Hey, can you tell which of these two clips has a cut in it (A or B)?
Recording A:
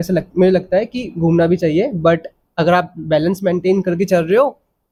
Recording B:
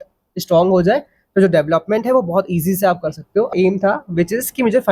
B